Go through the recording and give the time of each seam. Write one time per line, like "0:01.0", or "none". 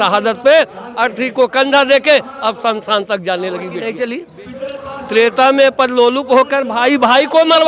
0:03.8

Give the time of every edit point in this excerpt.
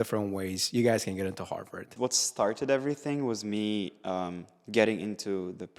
0:01.9

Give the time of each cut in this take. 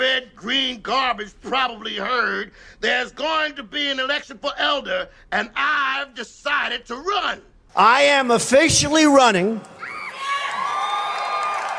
0:08.0

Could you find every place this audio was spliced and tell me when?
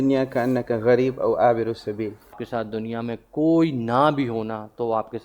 0:02.4

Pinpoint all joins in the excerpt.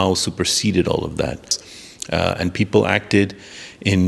0:01.6

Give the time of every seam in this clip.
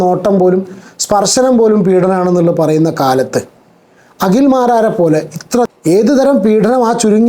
0:05.7

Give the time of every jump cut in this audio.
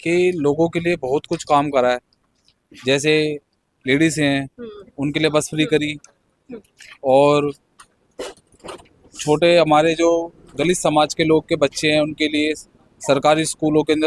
none

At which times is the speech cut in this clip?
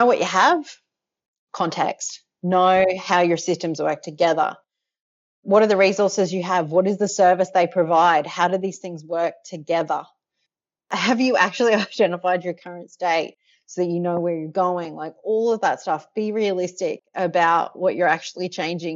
0:01.3

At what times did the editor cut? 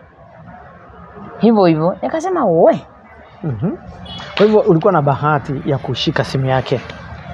none

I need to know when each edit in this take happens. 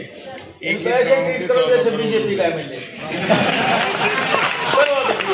none

